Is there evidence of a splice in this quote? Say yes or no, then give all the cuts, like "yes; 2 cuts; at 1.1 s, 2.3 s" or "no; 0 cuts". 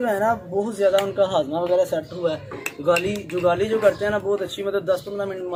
no; 0 cuts